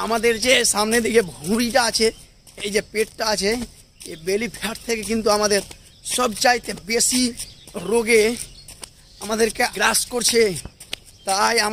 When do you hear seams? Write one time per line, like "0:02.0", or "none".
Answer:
0:09.7